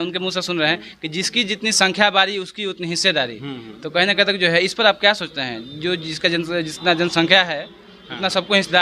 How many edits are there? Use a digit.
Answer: 0